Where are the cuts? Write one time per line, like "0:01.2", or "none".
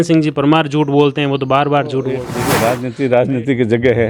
0:02.3